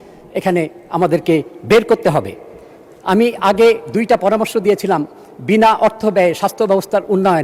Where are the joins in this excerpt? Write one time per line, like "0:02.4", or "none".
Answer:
none